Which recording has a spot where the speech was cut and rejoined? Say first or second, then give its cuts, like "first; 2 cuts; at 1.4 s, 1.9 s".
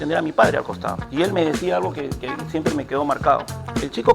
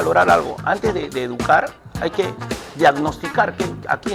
first; 1 cut; at 1.0 s